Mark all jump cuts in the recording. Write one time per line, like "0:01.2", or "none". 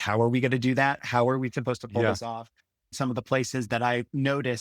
0:02.9